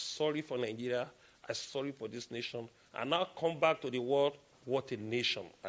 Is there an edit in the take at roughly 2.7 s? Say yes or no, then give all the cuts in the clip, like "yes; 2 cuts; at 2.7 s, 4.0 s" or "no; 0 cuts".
no; 1 cut; at 4.6 s